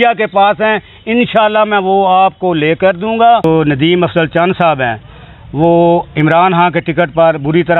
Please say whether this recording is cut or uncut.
cut